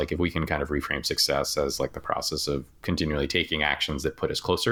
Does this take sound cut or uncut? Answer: uncut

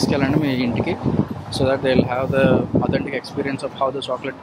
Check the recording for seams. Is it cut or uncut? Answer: uncut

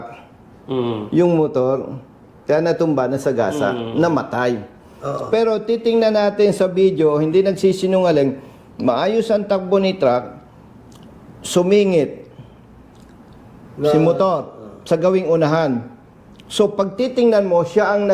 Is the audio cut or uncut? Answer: uncut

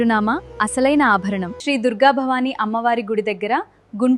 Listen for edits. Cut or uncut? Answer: cut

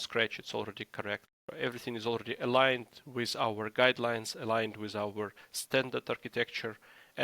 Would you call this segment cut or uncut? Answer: cut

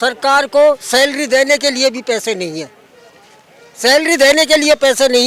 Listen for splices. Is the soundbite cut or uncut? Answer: uncut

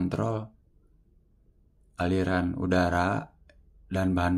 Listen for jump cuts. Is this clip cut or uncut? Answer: uncut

